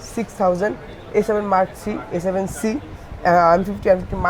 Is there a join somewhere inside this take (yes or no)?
no